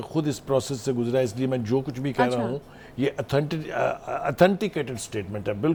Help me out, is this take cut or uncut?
uncut